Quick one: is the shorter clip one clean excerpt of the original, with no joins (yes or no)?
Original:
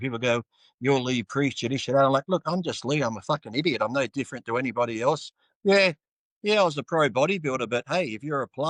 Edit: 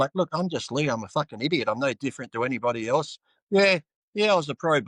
no